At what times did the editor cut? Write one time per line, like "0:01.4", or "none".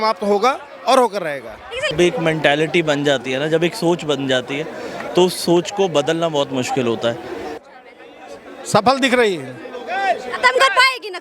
0:01.9
0:07.6